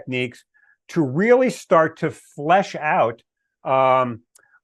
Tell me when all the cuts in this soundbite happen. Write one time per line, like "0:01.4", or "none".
none